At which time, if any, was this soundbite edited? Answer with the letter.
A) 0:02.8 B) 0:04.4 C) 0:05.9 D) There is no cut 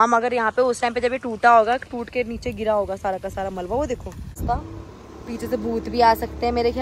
B